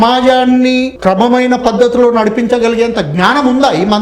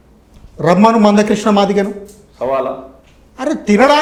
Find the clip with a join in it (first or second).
first